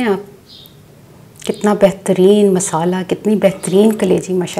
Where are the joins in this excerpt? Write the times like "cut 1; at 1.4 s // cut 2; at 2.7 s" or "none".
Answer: none